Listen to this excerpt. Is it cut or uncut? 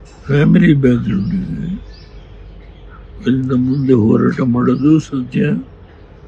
uncut